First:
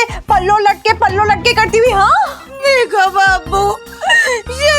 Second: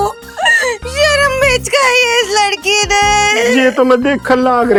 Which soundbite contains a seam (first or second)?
first